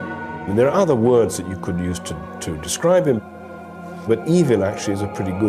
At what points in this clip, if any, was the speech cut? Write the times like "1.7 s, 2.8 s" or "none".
3.1 s

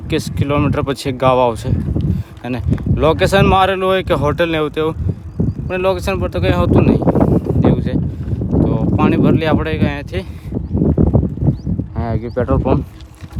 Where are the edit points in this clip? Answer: none

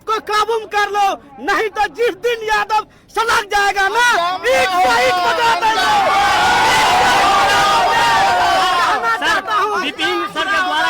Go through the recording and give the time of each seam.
none

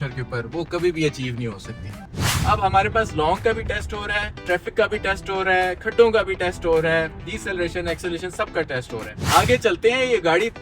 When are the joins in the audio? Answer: 2.2 s, 4.4 s, 9.2 s

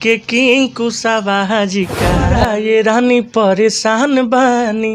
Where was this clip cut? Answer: 2.3 s

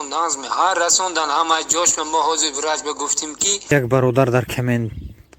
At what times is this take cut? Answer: 3.6 s

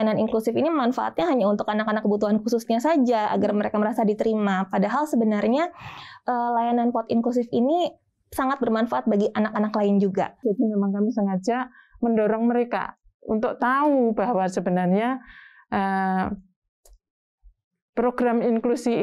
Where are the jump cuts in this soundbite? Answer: 10.4 s

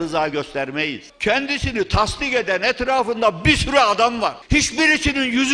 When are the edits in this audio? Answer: 1.0 s, 4.4 s

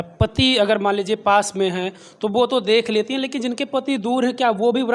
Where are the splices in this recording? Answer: none

